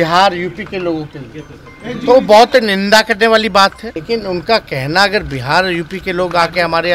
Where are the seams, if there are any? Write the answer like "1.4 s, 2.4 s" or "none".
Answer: 3.9 s